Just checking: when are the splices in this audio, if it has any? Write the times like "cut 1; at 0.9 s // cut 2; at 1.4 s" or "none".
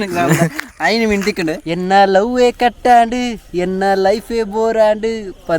cut 1; at 1.7 s